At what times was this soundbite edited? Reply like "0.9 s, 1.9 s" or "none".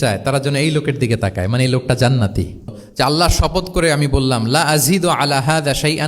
2.8 s

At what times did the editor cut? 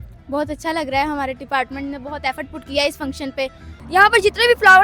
3.7 s

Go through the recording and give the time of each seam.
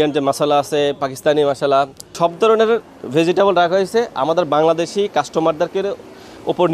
2.1 s

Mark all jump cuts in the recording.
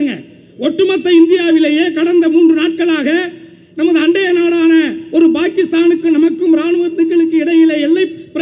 none

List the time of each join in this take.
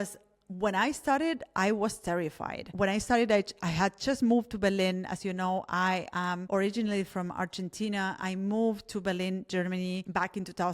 6.4 s

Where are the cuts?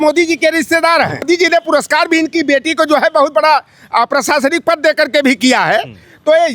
1.2 s

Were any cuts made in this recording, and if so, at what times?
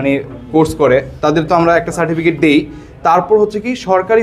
none

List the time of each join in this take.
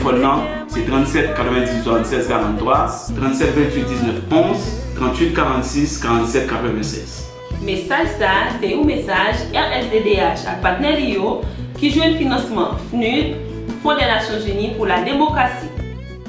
13.5 s

